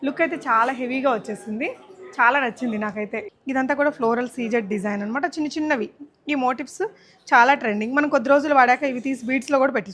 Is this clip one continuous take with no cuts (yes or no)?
no